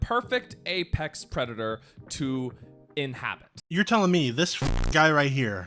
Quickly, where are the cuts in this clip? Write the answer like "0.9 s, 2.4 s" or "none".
3.5 s